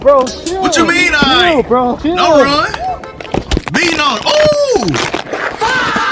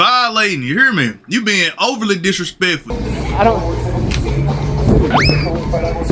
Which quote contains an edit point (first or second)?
second